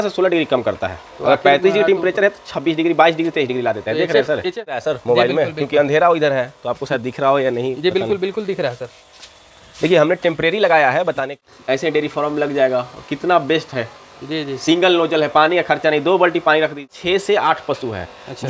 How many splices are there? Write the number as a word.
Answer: three